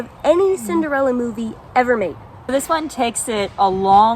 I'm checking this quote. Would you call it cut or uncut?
cut